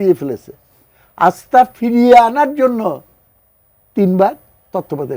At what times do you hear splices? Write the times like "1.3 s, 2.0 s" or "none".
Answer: none